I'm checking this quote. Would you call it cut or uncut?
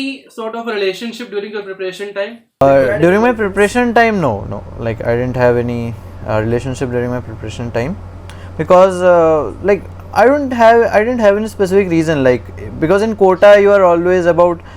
uncut